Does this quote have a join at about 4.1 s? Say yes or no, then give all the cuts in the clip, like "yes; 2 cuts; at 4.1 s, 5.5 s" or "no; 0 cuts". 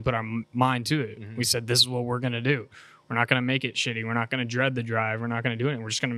no; 0 cuts